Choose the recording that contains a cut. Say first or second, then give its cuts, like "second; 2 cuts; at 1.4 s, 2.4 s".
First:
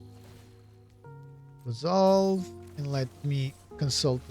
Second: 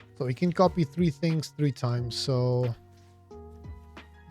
first; 1 cut; at 1.4 s